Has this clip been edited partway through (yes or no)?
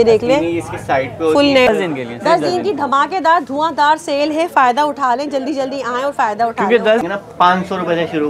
yes